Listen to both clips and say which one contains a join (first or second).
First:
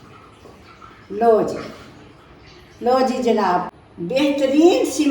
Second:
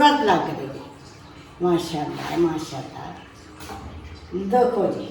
first